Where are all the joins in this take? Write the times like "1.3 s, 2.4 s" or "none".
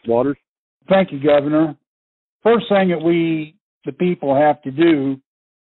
none